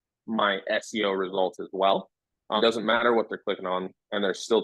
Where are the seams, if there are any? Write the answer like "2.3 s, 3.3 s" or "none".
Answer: 2.6 s